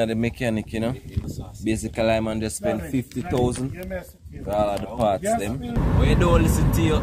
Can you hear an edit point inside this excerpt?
yes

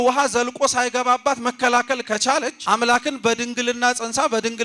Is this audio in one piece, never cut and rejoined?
no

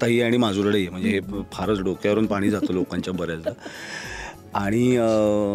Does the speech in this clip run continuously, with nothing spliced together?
yes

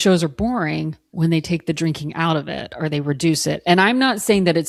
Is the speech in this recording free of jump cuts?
yes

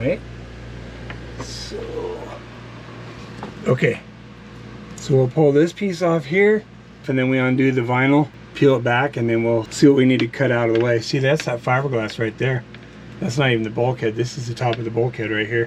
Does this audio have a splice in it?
yes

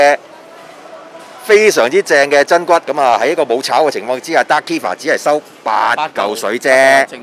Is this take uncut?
yes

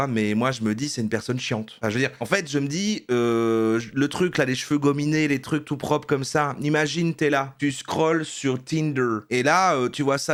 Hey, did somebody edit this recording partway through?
no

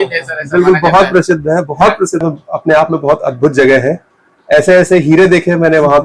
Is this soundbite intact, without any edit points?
no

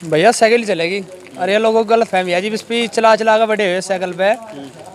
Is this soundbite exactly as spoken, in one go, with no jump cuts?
yes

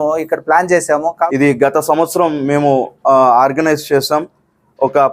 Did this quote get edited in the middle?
yes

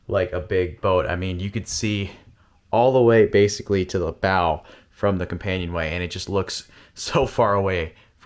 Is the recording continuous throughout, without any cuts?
yes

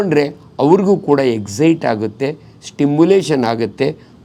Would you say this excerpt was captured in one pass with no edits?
yes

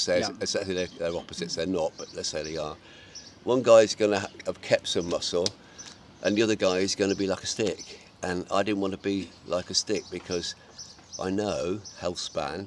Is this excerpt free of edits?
yes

